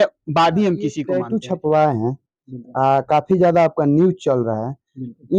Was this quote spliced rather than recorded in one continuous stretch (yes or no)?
yes